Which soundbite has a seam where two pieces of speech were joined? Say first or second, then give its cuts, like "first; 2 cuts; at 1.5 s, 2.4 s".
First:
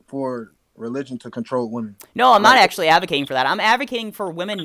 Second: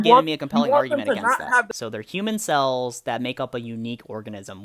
second; 1 cut; at 1.7 s